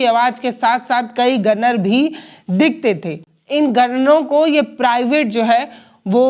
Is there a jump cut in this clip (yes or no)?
no